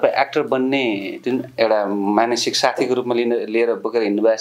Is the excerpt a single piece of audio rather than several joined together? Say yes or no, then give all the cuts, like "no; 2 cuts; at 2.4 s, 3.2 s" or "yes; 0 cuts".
yes; 0 cuts